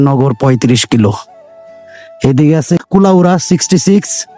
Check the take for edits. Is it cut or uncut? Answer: cut